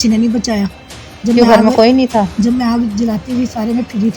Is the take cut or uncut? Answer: uncut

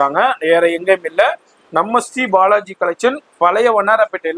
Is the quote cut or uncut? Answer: uncut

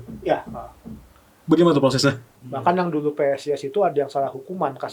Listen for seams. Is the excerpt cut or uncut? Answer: cut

